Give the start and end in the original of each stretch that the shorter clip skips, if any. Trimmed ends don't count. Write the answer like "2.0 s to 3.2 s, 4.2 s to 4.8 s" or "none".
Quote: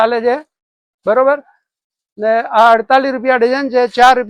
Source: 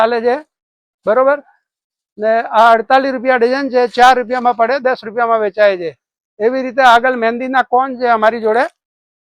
none